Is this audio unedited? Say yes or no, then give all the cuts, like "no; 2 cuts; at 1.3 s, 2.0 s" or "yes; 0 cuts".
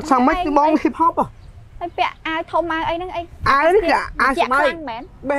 yes; 0 cuts